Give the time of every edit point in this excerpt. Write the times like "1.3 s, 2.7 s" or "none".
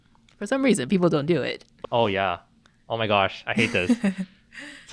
2.0 s